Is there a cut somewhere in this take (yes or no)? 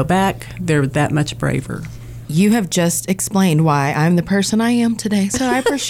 yes